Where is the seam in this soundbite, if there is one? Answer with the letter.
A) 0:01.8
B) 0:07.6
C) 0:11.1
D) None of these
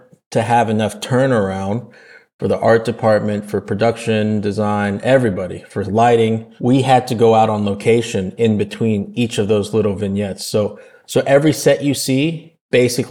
D